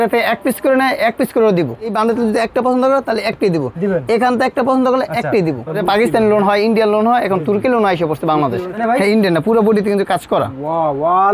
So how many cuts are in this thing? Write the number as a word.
three